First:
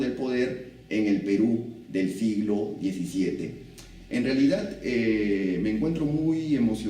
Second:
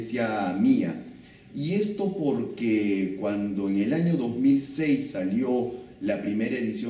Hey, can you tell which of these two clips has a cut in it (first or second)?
second